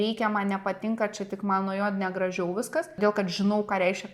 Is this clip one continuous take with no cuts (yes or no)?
no